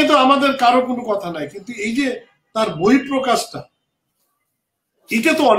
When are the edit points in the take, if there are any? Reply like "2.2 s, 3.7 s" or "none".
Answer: none